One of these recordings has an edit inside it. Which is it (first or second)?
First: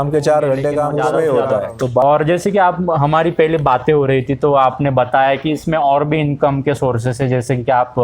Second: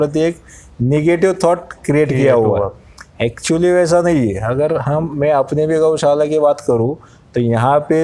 first